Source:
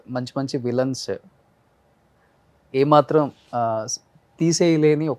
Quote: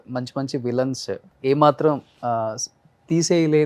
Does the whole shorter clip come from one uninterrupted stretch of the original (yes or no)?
no